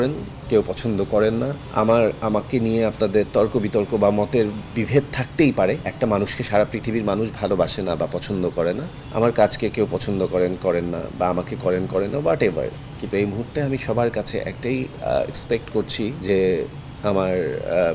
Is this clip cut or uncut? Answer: cut